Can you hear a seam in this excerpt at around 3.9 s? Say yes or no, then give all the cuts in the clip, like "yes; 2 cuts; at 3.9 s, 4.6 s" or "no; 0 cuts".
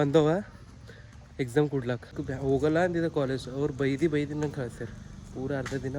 no; 1 cut; at 2.2 s